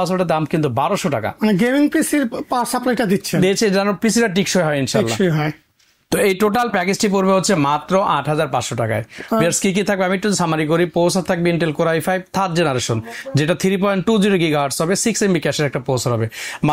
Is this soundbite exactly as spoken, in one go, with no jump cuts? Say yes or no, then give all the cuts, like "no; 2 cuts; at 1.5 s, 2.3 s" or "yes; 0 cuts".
yes; 0 cuts